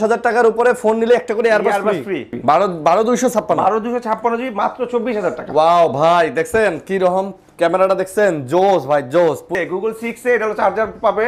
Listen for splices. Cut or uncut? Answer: cut